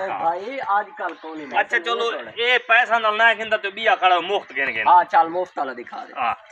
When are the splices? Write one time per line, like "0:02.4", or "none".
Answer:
0:01.4

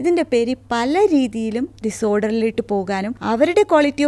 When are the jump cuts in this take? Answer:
0:03.1

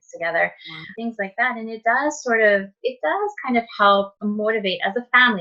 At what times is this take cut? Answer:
0:00.9
0:04.1

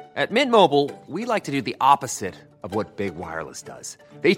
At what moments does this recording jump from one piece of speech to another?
none

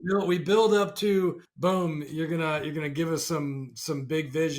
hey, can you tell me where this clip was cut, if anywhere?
0:01.5

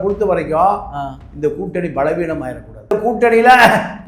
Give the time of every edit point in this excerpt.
0:03.0

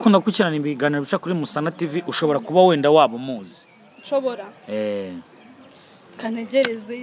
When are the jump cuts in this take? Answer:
none

